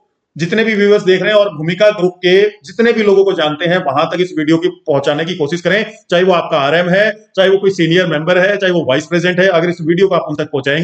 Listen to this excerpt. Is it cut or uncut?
uncut